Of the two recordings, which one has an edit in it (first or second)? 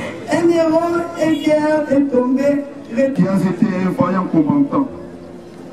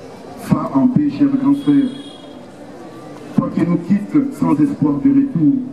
first